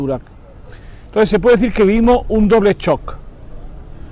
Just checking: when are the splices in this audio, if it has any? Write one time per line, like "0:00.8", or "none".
0:01.3

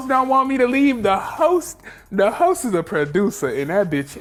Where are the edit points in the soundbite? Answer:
none

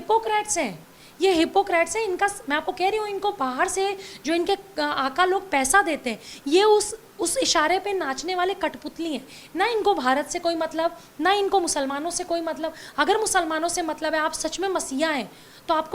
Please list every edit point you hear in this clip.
none

